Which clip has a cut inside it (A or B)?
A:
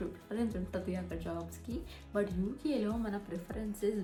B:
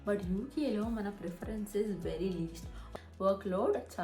B